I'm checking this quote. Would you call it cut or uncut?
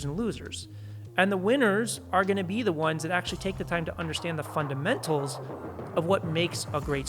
uncut